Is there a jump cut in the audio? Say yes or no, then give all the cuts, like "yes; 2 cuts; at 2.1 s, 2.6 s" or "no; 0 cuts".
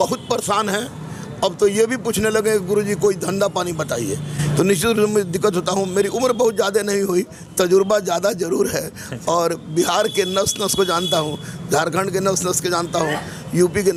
no; 0 cuts